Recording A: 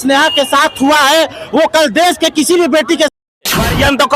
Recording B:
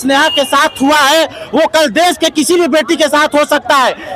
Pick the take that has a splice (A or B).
A